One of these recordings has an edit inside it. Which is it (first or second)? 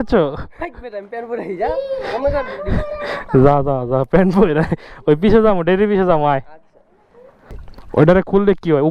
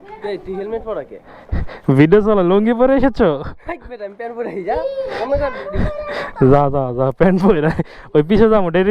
first